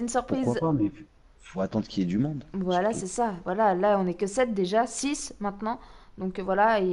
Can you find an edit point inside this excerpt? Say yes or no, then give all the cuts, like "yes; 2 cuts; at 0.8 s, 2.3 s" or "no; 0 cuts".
no; 0 cuts